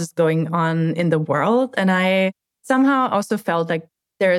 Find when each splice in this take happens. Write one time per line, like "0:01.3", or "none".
none